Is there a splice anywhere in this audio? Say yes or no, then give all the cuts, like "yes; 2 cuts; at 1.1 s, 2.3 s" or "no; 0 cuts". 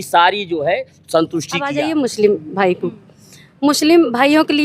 yes; 1 cut; at 1.6 s